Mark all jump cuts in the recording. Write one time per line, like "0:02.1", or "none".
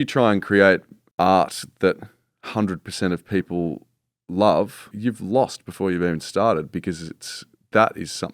0:01.0
0:04.9